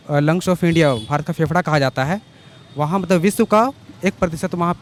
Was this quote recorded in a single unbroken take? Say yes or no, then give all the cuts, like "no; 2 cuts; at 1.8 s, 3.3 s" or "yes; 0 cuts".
yes; 0 cuts